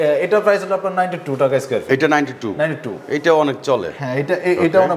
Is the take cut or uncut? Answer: uncut